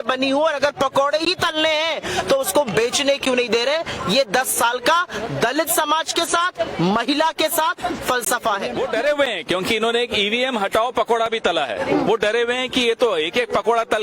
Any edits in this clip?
yes; 1 cut; at 8.8 s

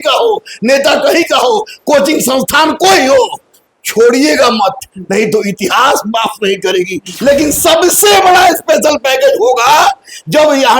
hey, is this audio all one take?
no; 1 cut; at 7.0 s

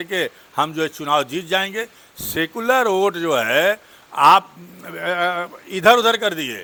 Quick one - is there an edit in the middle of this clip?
no; 0 cuts

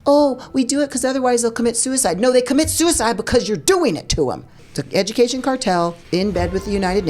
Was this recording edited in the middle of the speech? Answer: yes; 2 cuts; at 4.5 s, 6.0 s

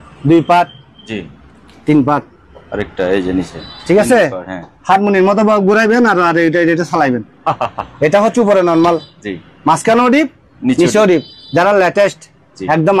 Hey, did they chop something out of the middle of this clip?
no; 0 cuts

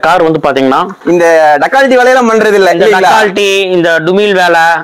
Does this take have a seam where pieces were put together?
yes; 1 cut; at 0.9 s

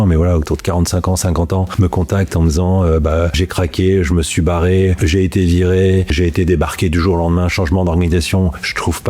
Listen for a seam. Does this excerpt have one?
yes; 4 cuts; at 1.7 s, 3.4 s, 5.0 s, 6.1 s

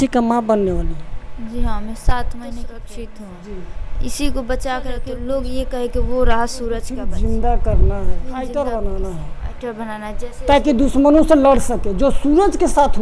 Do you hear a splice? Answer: yes; 4 cuts; at 2.8 s, 5.1 s, 7.0 s, 8.3 s

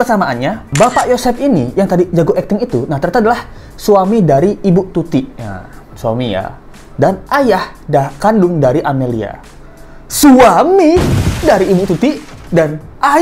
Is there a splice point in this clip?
no; 0 cuts

